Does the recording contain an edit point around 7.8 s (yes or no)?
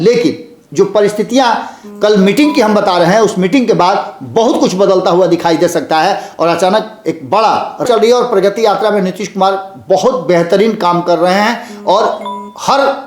yes